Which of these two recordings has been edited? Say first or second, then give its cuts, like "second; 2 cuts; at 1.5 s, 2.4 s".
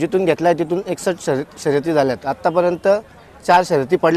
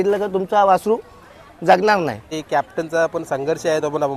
second; 1 cut; at 2.3 s